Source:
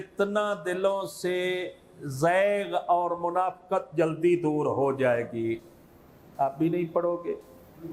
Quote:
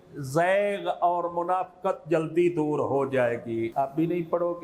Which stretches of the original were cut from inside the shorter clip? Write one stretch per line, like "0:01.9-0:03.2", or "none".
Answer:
0:05.6-0:06.3